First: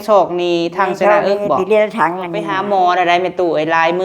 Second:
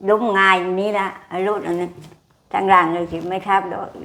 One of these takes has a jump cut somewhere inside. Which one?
first; 1 cut; at 2.5 s

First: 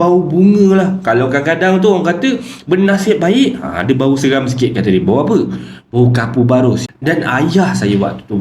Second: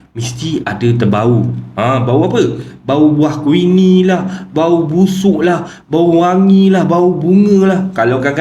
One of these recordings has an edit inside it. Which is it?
first; 1 cut; at 6.8 s

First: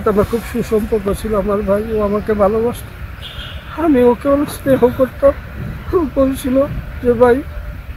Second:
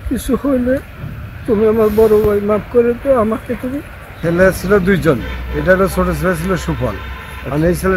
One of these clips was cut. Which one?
second; 1 cut; at 4.2 s

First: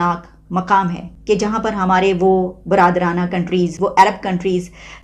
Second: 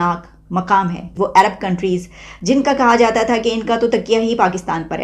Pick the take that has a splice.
second; 1 cut; at 1.1 s

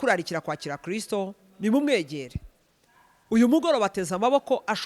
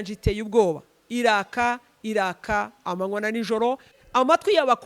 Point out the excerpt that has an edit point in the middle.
second; 1 cut; at 3.9 s

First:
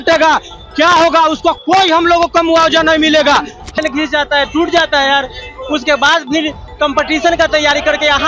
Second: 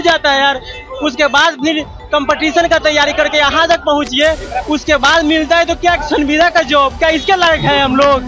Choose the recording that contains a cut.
first; 1 cut; at 3.8 s

